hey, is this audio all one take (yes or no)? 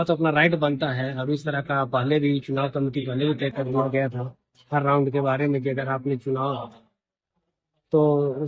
yes